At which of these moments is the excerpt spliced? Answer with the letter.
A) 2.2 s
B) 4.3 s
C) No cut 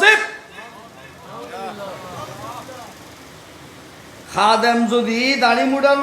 B